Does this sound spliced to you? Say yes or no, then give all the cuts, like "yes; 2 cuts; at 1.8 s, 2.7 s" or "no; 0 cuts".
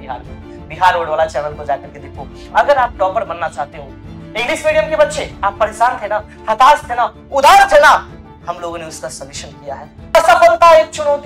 yes; 2 cuts; at 2.5 s, 10.1 s